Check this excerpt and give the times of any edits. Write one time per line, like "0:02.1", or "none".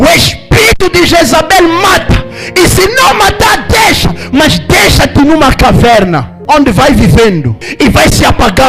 0:06.3
0:07.6